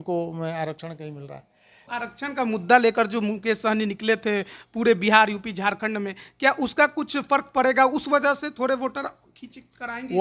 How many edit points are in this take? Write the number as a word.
one